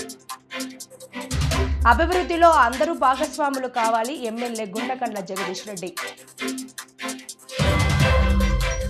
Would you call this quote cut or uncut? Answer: uncut